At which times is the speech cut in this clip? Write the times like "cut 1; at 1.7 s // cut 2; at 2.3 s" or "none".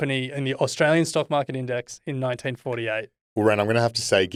none